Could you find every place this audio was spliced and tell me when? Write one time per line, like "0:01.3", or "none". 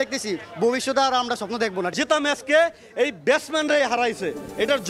0:01.9

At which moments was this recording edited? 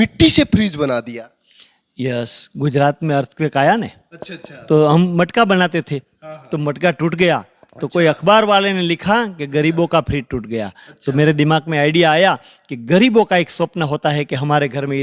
none

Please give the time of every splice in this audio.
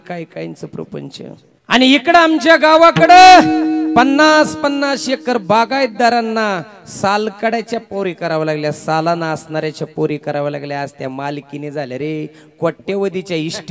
0:01.5

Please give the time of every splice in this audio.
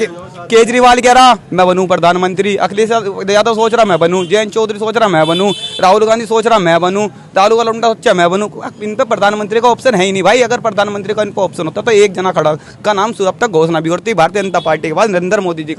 none

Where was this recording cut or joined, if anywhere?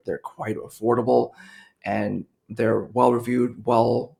none

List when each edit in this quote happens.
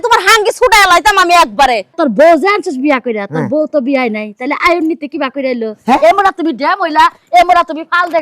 0:01.9

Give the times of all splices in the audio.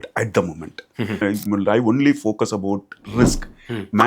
0:01.2

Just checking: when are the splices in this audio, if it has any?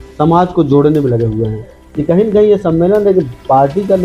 0:01.8

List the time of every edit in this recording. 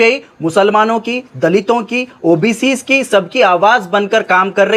none

